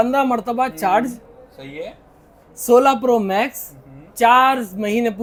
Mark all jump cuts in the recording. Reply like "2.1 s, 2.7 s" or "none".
none